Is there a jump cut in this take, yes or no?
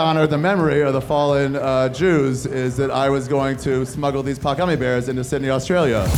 no